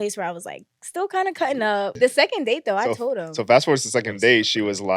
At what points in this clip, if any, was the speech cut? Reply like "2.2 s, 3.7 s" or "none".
1.9 s